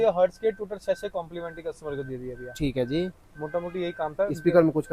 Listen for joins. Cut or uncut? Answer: uncut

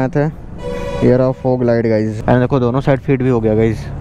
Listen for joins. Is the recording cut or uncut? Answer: cut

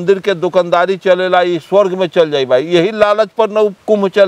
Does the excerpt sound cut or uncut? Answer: uncut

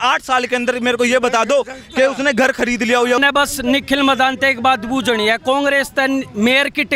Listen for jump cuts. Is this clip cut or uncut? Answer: cut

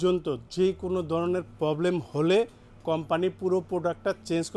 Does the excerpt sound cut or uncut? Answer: uncut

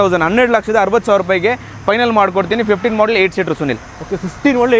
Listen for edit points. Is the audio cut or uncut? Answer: uncut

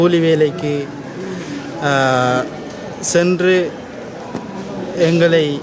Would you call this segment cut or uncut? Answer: uncut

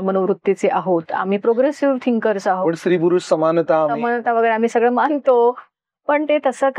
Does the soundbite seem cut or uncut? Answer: cut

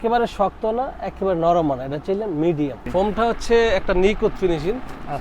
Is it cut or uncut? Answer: cut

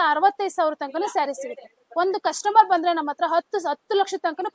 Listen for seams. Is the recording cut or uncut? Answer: uncut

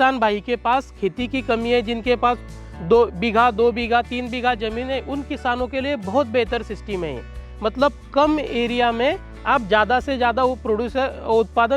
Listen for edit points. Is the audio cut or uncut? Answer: uncut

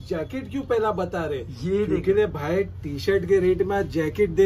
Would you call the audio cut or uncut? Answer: uncut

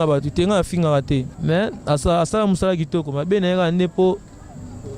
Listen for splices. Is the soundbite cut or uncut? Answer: cut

